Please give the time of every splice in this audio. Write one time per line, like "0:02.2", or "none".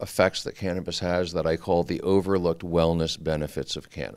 none

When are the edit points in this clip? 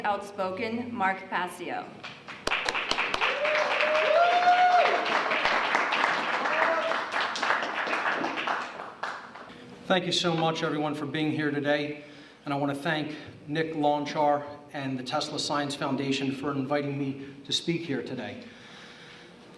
0:10.9

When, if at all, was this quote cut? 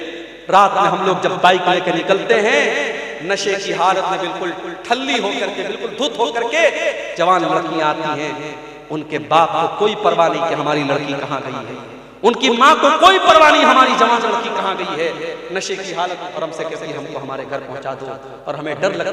0:16.3

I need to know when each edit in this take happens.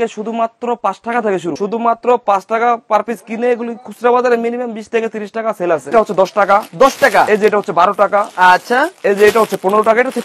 0:01.5
0:05.9

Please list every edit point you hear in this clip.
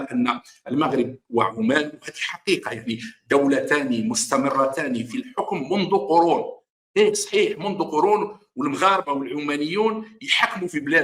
none

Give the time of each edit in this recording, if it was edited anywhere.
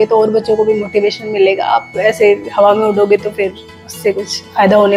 none

